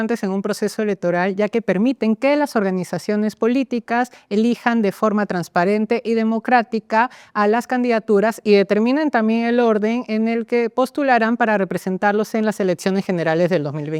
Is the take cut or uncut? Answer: uncut